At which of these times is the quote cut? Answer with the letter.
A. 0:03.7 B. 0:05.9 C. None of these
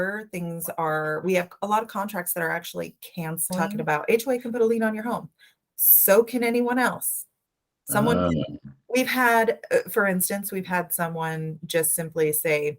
A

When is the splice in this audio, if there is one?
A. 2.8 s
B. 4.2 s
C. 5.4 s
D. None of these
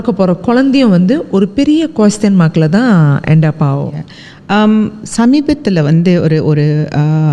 D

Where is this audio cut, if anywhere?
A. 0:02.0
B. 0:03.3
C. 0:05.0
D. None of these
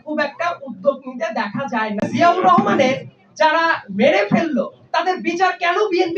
A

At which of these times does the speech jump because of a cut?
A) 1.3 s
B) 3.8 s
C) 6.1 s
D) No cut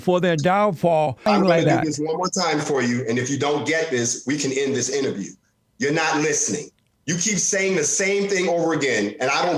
A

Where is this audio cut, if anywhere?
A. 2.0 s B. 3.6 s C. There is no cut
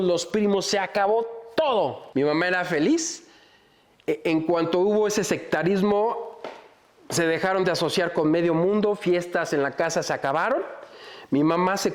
A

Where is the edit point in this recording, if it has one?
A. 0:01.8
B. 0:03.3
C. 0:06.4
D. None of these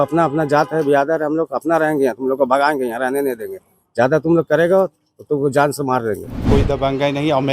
C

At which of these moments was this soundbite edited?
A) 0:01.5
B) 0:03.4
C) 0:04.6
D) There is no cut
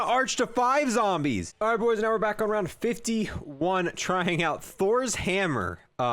A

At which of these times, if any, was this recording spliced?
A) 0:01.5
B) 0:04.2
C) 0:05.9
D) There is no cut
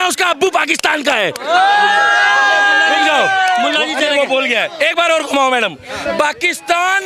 D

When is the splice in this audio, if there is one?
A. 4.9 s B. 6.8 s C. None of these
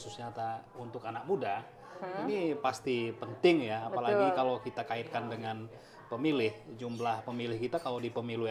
C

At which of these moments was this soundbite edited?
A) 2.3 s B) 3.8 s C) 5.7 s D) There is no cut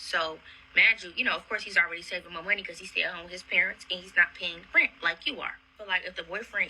C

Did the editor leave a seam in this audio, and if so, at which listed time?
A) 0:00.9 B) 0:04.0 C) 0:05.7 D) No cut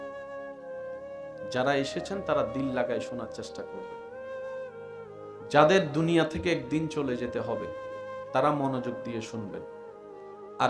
D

